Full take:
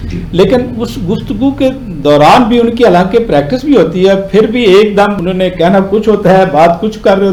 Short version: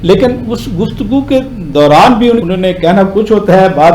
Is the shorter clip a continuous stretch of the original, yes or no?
no